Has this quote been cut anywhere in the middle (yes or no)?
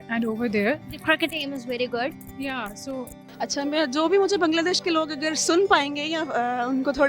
yes